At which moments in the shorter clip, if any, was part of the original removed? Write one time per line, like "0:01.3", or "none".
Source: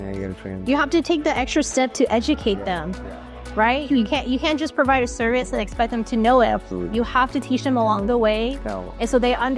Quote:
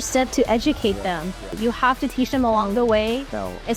0:01.4